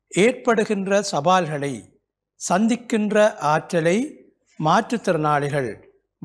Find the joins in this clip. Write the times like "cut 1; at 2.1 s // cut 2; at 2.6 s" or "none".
none